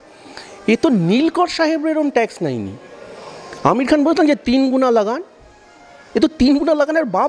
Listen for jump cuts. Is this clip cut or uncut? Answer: uncut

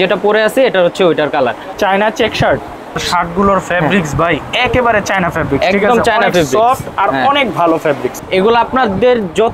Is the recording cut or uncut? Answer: cut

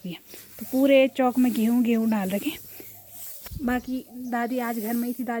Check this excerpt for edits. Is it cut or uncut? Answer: uncut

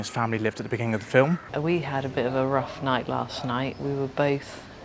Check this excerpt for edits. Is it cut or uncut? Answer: cut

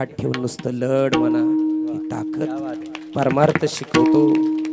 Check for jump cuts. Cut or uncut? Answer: uncut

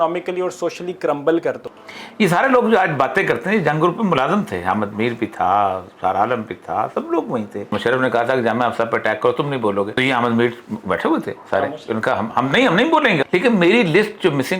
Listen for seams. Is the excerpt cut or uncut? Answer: cut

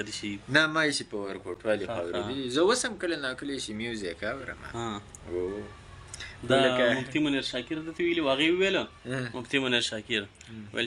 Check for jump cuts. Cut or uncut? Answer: uncut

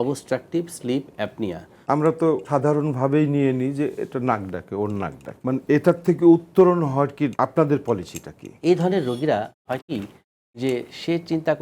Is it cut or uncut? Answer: cut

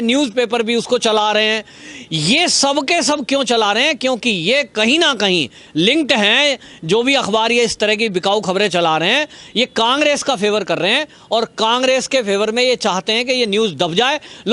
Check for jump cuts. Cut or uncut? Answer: uncut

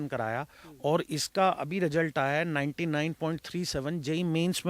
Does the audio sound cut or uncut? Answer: uncut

